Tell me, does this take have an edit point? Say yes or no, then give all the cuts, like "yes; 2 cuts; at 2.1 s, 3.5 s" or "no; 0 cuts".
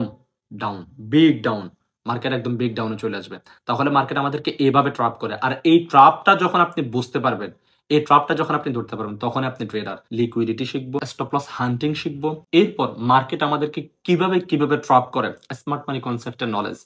yes; 2 cuts; at 10.0 s, 11.1 s